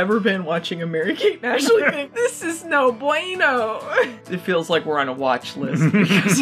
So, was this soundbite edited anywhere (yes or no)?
yes